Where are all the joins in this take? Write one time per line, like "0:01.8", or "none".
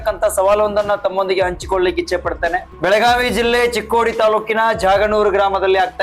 0:02.7

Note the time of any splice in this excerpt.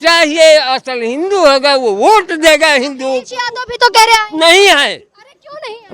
none

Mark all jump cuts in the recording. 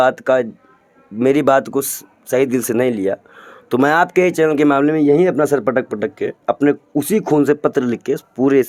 none

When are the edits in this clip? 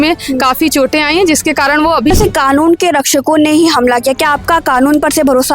0:02.1

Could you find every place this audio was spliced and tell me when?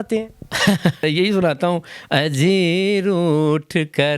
0:01.0

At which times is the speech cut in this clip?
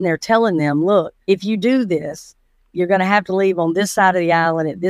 0:01.1

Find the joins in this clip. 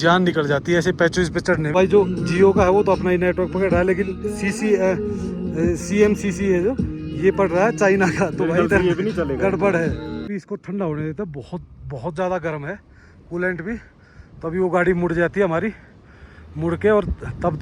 0:01.7
0:10.2

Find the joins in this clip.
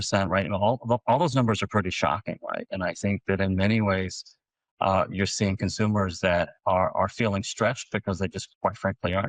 none

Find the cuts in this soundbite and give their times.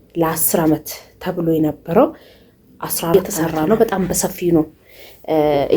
0:03.1

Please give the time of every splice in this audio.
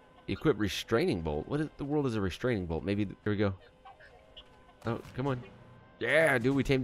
0:03.2

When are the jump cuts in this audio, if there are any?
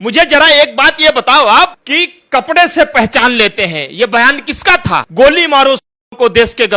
0:01.8
0:05.1

